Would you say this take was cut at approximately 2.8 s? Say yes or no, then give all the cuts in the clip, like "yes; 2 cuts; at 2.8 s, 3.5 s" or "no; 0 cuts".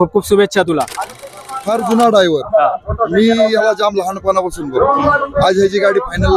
no; 1 cut; at 1.3 s